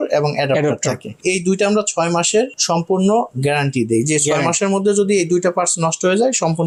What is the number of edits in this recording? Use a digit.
0